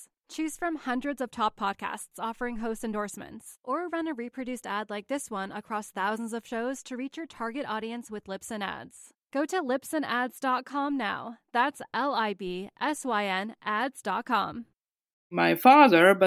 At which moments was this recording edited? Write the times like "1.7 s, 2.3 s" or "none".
15.3 s